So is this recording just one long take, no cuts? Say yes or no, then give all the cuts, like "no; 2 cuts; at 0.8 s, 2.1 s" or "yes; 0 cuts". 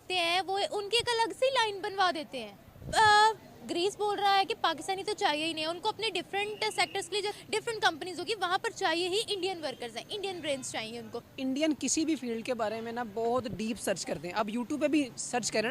yes; 0 cuts